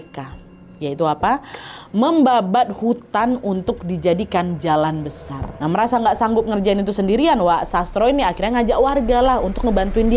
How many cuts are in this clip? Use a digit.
1